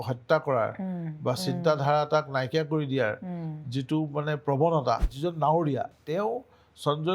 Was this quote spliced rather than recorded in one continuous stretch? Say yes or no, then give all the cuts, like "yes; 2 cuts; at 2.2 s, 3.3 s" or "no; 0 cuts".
yes; 2 cuts; at 5.1 s, 6.0 s